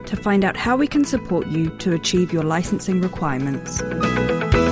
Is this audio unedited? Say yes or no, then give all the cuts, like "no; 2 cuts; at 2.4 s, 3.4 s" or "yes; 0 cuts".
no; 1 cut; at 3.8 s